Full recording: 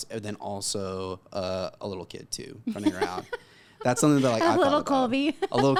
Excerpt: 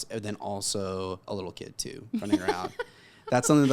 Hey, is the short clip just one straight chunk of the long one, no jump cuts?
no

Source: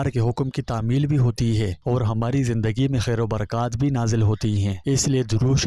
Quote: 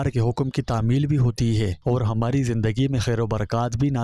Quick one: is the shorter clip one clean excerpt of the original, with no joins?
yes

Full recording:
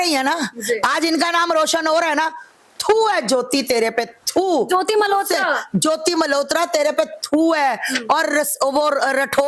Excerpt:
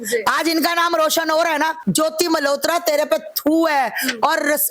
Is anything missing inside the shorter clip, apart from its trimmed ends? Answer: yes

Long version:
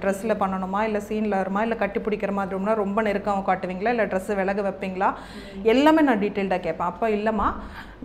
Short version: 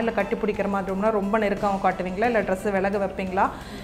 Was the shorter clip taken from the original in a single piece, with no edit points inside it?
yes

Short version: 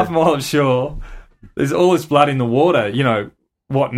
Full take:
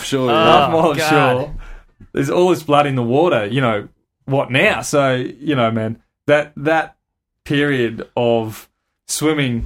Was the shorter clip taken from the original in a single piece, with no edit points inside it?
yes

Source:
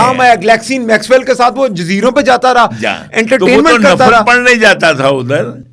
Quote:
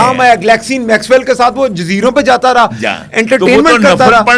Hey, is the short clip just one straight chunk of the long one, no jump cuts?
yes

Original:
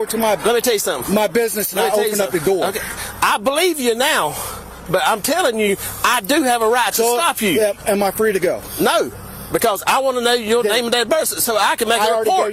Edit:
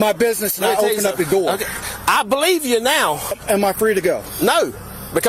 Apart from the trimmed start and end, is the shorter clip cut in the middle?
yes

